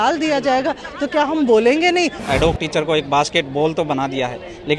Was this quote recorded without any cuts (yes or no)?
no